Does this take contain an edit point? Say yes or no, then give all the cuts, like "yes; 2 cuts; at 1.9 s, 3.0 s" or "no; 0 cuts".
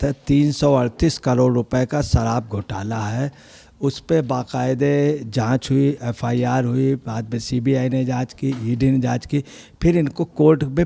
no; 0 cuts